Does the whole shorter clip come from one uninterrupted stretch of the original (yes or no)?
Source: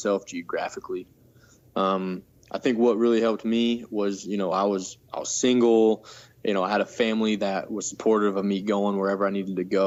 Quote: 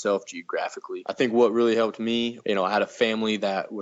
no